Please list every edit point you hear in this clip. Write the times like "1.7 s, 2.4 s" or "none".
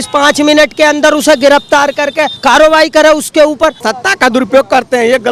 2.3 s, 3.9 s